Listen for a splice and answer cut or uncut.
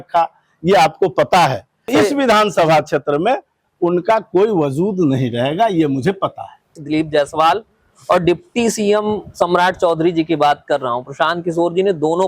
cut